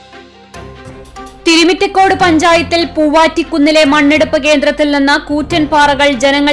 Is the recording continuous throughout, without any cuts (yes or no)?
yes